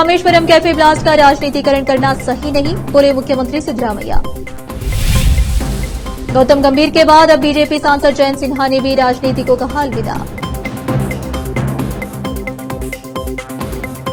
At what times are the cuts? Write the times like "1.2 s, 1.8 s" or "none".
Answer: none